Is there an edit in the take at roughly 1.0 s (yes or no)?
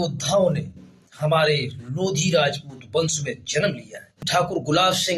no